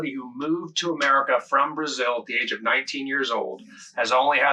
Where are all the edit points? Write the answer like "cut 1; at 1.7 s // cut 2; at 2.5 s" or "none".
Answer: none